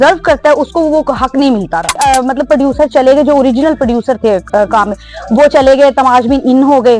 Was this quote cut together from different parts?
yes; 1 cut; at 2.0 s

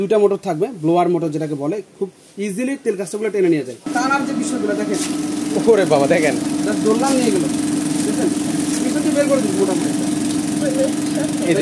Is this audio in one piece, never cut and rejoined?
no; 1 cut; at 3.8 s

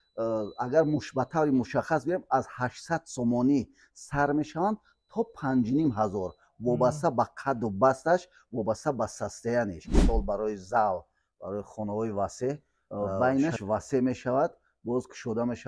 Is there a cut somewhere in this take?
yes; 2 cuts; at 10.0 s, 12.8 s

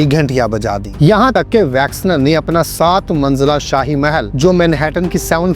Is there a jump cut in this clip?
yes; 2 cuts; at 1.3 s, 4.3 s

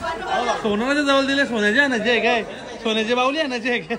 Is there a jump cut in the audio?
no; 0 cuts

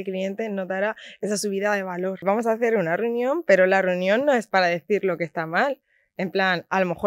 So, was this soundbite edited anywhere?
yes; 1 cut; at 2.2 s

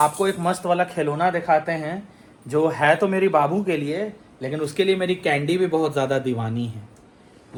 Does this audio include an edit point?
no; 0 cuts

